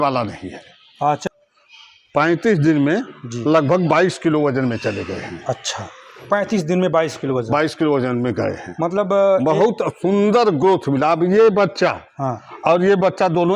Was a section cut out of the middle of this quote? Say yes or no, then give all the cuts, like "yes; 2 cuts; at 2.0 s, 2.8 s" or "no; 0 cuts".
yes; 1 cut; at 1.2 s